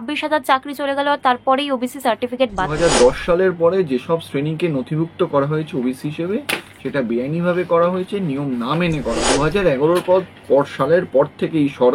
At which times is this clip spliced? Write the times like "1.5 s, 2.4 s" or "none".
2.7 s, 9.3 s